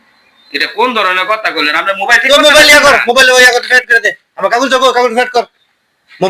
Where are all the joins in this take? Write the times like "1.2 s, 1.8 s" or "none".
none